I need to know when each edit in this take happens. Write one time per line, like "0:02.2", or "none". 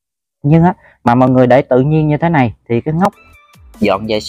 0:03.1